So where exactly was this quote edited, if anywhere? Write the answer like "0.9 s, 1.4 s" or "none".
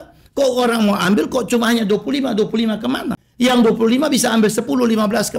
3.2 s